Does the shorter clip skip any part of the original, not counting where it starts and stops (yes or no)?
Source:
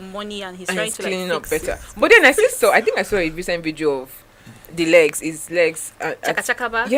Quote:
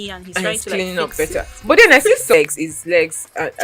yes